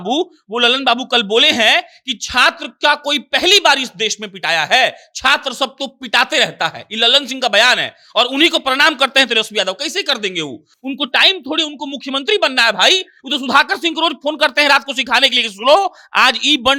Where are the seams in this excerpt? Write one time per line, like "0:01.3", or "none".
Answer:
none